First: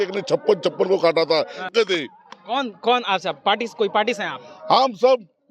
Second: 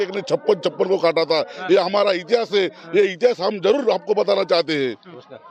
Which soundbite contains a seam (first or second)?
first